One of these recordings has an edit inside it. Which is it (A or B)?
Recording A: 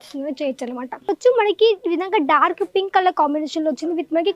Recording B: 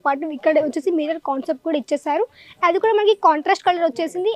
A